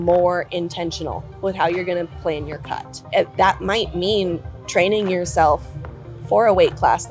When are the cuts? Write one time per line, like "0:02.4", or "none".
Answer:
0:03.1

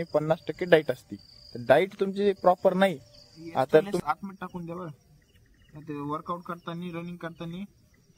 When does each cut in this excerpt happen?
0:04.0

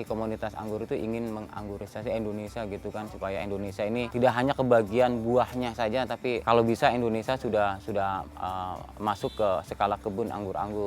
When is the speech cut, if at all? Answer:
0:04.1
0:06.4

